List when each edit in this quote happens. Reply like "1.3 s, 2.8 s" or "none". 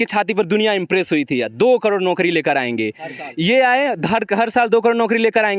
none